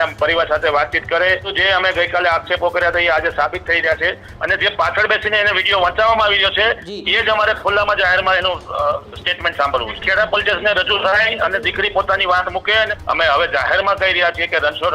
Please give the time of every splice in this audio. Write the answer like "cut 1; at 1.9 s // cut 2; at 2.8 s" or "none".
cut 1; at 1.5 s // cut 2; at 4.3 s // cut 3; at 9.9 s // cut 4; at 12.9 s